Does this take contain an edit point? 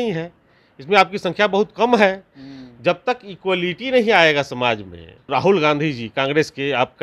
yes; 1 cut; at 5.3 s

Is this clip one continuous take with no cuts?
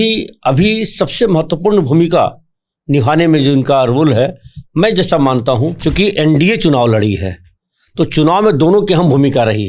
no; 1 cut; at 5.8 s

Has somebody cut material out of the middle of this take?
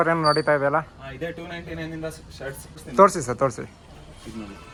no; 0 cuts

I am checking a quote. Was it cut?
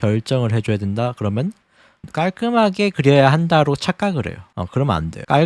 no; 0 cuts

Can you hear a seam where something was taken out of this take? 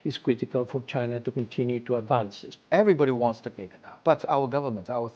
yes; 2 cuts; at 2.5 s, 3.9 s

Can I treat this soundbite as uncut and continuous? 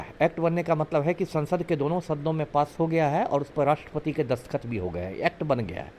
yes; 0 cuts

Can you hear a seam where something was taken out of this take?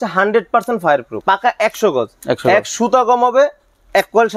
yes; 1 cut; at 1.1 s

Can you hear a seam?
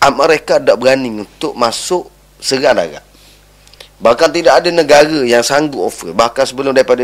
no; 0 cuts

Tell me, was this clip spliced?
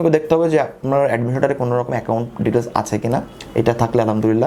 no; 0 cuts

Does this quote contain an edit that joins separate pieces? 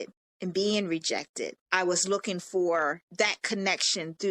yes; 2 cuts; at 1.6 s, 3.0 s

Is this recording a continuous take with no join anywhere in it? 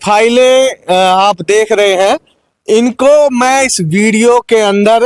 yes; 0 cuts

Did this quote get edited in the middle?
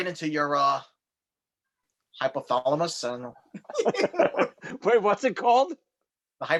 no; 0 cuts

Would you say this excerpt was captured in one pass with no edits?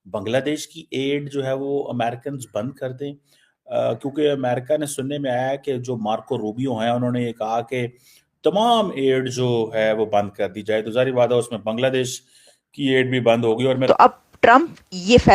no; 1 cut; at 13.8 s

